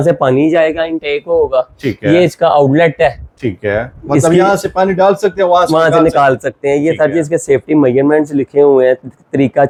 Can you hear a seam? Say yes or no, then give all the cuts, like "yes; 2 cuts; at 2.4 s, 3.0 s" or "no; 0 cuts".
no; 0 cuts